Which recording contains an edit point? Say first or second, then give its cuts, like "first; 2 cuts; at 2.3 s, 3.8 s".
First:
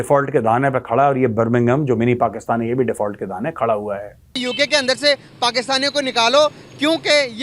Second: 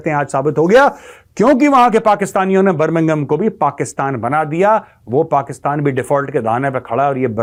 first; 1 cut; at 4.4 s